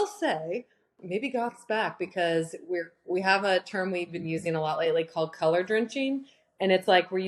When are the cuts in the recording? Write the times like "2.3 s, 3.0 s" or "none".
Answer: 0.9 s